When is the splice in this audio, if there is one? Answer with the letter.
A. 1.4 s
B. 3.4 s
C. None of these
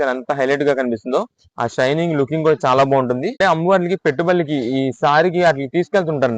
B